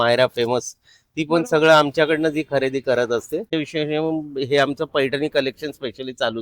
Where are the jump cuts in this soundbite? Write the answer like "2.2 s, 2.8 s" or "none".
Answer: 3.4 s